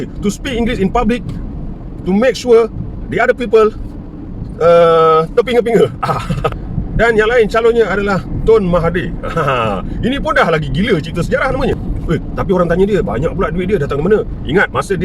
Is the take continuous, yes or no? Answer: no